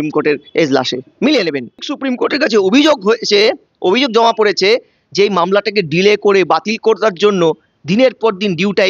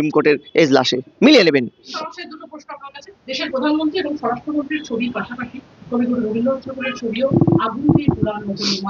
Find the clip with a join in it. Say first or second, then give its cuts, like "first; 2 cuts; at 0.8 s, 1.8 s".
first; 1 cut; at 1.9 s